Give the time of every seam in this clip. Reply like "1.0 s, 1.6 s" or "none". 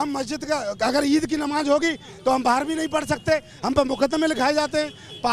none